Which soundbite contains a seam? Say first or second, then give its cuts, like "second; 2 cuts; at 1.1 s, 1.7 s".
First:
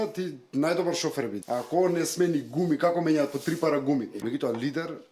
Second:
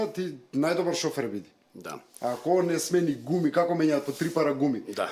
first; 2 cuts; at 1.4 s, 4.1 s